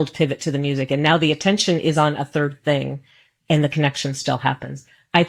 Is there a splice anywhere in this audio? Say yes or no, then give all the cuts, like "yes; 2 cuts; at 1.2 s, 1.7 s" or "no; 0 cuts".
no; 0 cuts